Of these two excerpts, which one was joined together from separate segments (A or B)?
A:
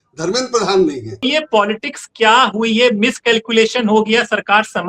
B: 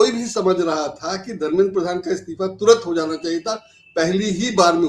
A